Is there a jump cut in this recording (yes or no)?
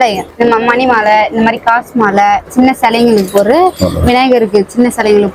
no